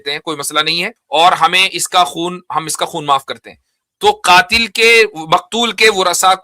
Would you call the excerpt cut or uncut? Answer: cut